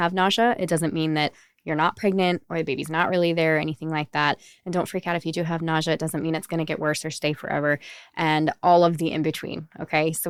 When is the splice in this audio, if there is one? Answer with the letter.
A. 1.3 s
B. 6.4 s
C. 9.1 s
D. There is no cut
D